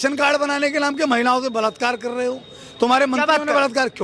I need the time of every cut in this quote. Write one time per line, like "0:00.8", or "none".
none